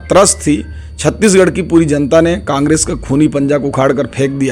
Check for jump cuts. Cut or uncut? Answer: uncut